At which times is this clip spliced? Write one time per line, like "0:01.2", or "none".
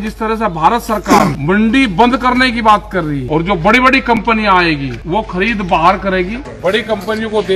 0:01.4
0:03.2
0:04.9
0:06.4